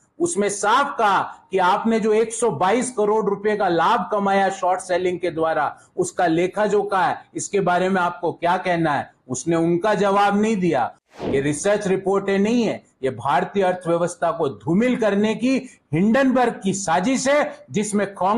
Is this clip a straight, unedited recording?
no; 1 cut; at 11.0 s

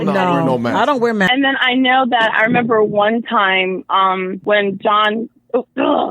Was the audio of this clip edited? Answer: yes; 2 cuts; at 1.3 s, 4.4 s

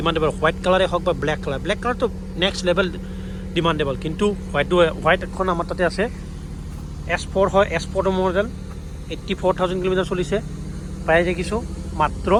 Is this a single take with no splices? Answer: yes; 0 cuts

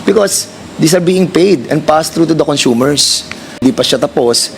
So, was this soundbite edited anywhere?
yes; 1 cut; at 3.6 s

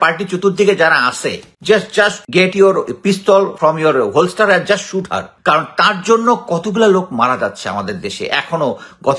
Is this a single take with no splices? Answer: no; 4 cuts; at 1.5 s, 2.2 s, 3.5 s, 5.2 s

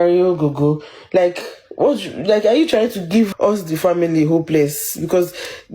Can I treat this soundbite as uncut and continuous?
no; 1 cut; at 3.3 s

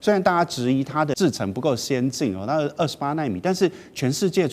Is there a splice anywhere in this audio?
yes; 1 cut; at 1.2 s

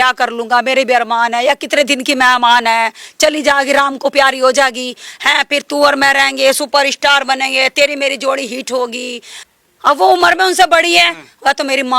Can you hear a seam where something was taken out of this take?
yes; 1 cut; at 9.4 s

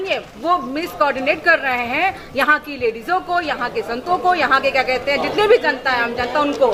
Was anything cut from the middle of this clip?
no; 0 cuts

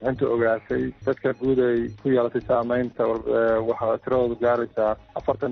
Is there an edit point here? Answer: no; 0 cuts

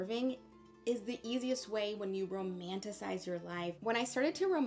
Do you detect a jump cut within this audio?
yes; 1 cut; at 3.7 s

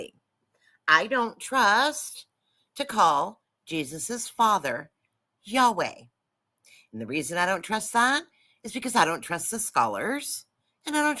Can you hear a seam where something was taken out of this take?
no; 0 cuts

